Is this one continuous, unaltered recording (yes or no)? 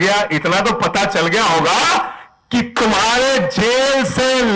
yes